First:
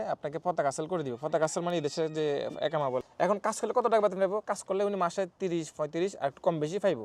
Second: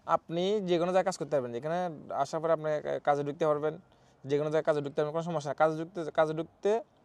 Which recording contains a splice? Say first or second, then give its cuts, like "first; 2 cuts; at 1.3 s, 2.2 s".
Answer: first; 1 cut; at 3.1 s